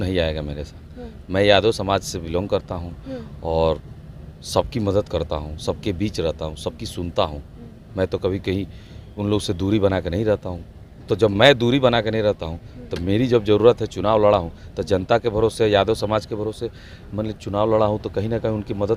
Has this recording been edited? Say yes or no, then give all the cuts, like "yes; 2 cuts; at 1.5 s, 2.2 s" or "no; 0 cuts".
no; 0 cuts